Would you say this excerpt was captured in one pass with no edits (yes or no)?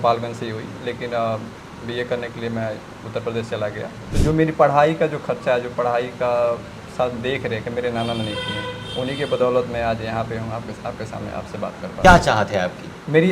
no